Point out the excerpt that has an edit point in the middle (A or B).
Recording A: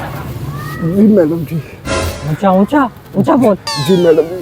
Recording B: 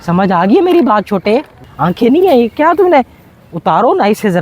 B